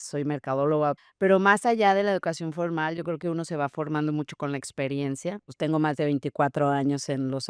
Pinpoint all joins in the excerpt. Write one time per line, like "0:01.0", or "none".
0:01.1
0:05.5

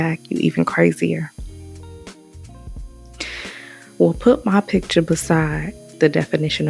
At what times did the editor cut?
none

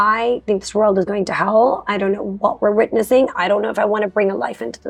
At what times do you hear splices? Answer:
none

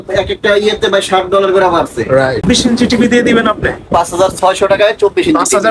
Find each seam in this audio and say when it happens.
0:02.4

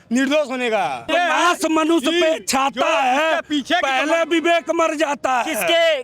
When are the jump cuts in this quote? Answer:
0:01.1

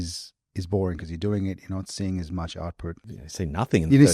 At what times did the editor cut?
0:03.1

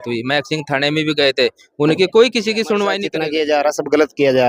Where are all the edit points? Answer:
0:03.1

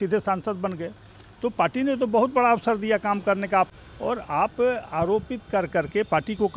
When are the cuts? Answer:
0:03.7

